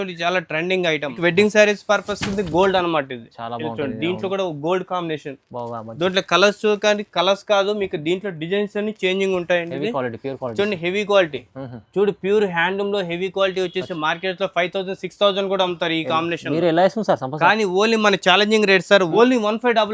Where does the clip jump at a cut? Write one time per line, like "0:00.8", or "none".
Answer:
0:01.2
0:19.1